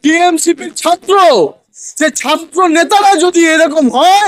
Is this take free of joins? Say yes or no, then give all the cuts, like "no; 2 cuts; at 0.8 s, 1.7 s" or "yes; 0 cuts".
yes; 0 cuts